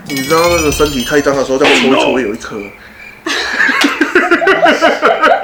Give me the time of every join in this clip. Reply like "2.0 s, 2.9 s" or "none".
none